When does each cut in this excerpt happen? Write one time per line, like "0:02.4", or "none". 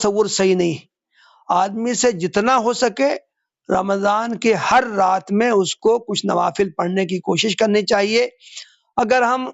none